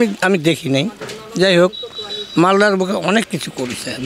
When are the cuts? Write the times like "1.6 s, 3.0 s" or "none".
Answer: none